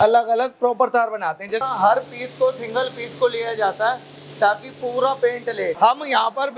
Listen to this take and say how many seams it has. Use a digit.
2